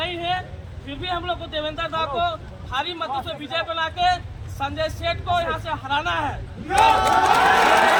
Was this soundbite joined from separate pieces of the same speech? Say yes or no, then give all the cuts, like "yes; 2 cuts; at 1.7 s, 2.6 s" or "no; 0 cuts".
no; 0 cuts